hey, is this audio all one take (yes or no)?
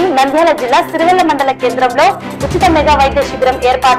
yes